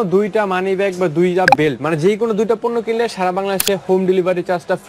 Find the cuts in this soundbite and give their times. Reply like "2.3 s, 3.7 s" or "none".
none